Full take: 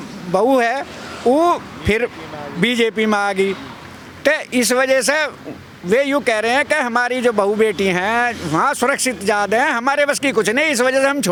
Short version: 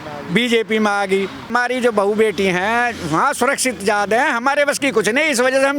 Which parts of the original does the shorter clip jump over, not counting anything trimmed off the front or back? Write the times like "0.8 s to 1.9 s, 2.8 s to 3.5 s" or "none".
3.8 s to 6.9 s

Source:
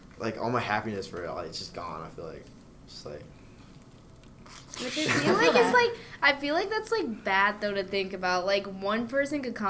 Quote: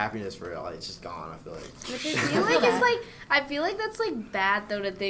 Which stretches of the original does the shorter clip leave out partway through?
2.5 s to 4.7 s

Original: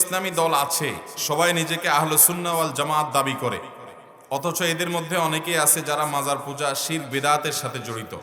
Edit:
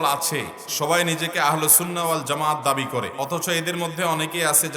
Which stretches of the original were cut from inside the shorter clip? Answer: 3.6 s to 4.2 s

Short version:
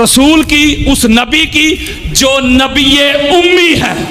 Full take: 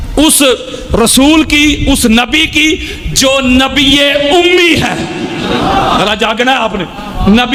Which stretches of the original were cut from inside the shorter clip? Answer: none

